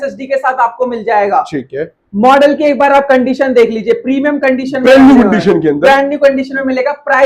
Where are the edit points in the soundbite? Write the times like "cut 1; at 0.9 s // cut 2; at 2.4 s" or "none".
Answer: none